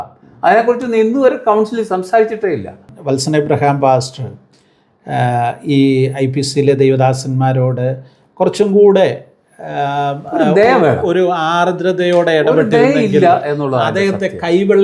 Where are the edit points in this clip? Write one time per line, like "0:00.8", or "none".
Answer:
0:02.9